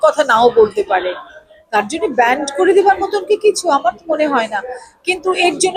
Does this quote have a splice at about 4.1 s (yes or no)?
no